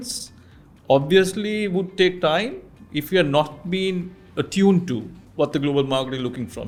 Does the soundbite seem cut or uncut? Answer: uncut